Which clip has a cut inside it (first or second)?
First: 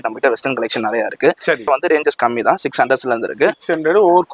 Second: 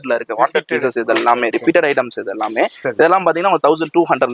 first